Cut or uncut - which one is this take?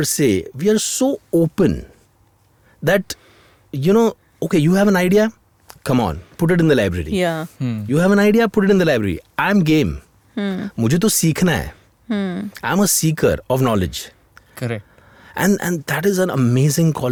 uncut